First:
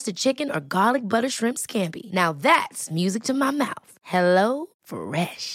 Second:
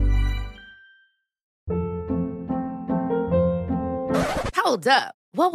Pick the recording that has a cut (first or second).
second